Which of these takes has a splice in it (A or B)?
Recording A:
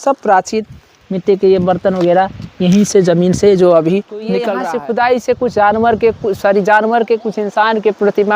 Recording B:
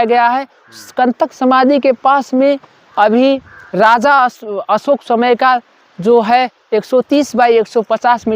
A